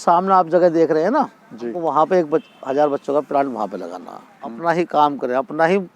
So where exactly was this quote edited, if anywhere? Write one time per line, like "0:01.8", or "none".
0:01.8
0:04.6